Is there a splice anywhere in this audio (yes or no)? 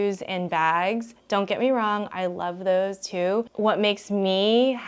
yes